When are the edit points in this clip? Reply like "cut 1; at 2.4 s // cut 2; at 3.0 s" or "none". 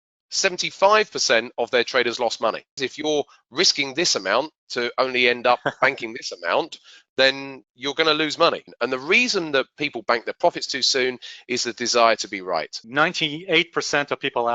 cut 1; at 2.8 s // cut 2; at 8.7 s // cut 3; at 12.8 s